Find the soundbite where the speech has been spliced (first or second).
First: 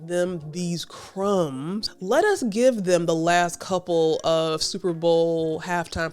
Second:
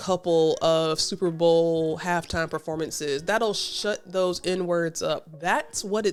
first